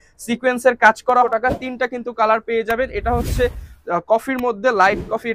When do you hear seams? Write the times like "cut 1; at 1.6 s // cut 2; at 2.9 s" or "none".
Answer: cut 1; at 1.2 s